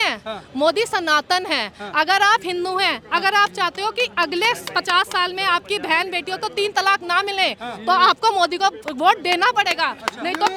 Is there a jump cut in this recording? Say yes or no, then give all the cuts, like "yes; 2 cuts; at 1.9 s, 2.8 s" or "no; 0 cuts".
no; 0 cuts